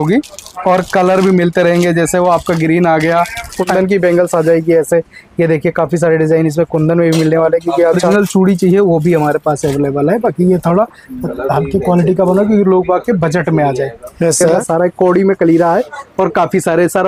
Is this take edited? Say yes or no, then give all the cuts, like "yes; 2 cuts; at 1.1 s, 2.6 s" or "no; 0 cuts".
yes; 3 cuts; at 3.6 s, 8.0 s, 14.6 s